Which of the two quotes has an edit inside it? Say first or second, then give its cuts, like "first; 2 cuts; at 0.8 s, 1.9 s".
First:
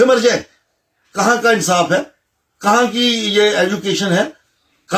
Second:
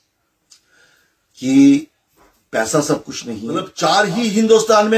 second; 1 cut; at 3.6 s